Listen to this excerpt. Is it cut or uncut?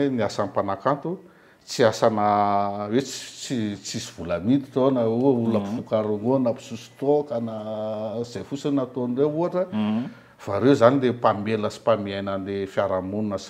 uncut